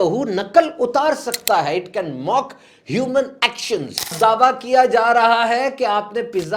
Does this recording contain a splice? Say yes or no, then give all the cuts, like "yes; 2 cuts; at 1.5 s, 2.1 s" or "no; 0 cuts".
yes; 1 cut; at 4.1 s